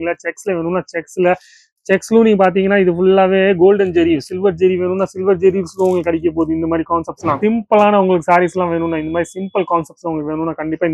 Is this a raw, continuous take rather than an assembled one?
no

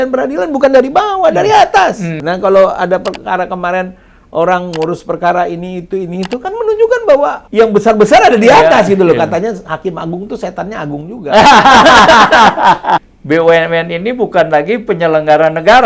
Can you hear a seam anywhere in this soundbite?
yes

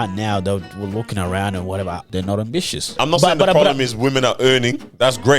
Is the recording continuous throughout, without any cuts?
no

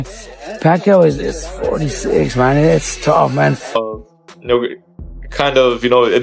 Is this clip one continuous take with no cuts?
no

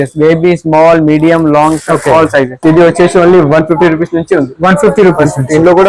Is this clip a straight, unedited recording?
no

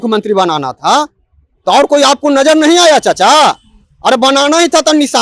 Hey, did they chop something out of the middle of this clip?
no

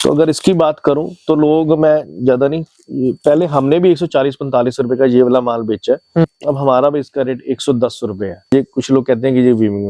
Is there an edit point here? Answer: yes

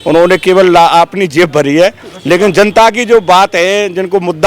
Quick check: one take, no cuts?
yes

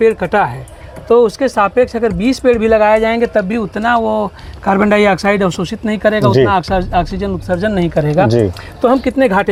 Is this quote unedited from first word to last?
yes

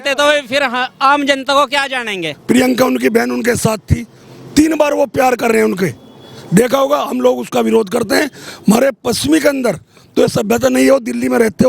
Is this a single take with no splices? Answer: no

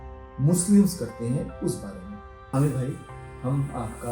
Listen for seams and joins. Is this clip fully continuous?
no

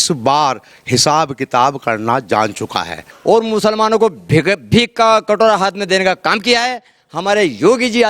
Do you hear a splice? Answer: yes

